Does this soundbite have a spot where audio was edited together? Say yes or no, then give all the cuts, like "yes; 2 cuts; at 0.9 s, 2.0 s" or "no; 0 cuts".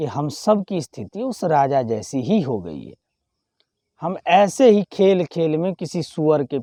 no; 0 cuts